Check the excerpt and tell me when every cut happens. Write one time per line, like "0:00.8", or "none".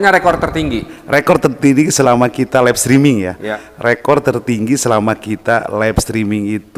none